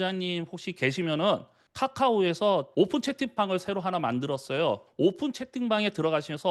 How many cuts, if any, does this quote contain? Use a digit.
1